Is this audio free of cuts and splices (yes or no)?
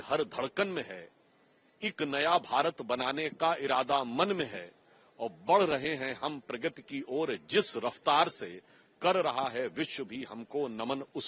yes